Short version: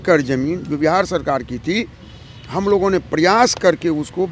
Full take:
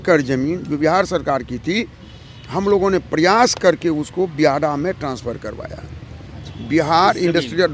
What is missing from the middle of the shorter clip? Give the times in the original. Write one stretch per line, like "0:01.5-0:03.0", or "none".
none